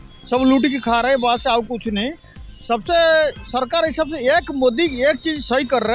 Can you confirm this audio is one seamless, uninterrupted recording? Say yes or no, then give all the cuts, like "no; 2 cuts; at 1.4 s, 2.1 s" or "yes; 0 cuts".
yes; 0 cuts